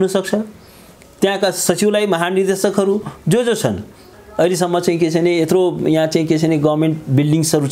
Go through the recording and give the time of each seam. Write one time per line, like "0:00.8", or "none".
0:04.0